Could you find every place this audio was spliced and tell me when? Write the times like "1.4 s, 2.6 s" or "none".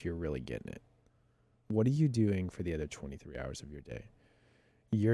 none